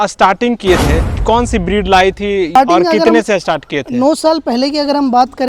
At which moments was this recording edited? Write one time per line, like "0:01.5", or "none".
0:01.1
0:02.6